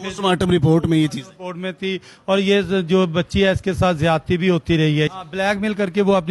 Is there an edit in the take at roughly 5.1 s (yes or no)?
yes